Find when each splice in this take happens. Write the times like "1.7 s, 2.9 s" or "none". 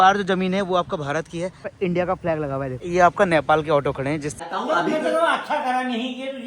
1.7 s, 2.8 s, 4.4 s